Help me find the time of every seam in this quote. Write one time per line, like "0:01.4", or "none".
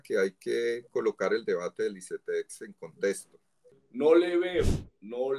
0:03.8